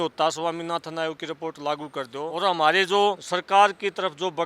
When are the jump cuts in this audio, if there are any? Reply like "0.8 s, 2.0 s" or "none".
2.3 s, 3.3 s